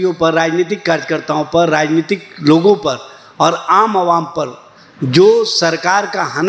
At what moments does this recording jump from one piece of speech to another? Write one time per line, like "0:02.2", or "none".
none